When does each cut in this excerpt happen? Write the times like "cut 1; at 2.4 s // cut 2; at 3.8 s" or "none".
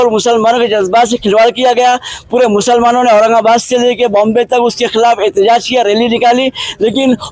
none